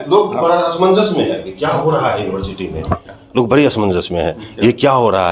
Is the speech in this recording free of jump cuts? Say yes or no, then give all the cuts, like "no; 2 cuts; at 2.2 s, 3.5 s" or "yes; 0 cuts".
yes; 0 cuts